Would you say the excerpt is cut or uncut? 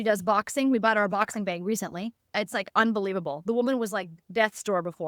cut